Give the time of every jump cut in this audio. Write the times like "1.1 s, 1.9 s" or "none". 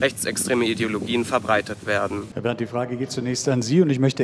2.3 s